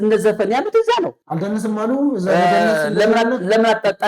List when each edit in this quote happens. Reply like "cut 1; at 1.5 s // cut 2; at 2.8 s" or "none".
cut 1; at 1.2 s